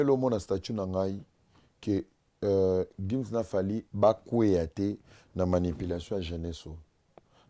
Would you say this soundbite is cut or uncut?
uncut